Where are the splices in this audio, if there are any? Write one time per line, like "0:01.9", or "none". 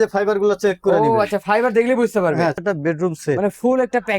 0:02.6